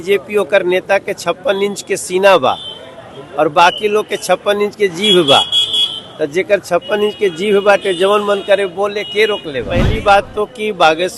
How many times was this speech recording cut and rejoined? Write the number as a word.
one